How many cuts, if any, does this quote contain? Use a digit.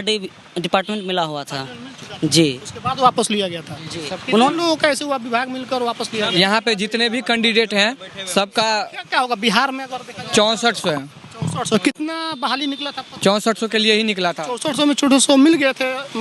0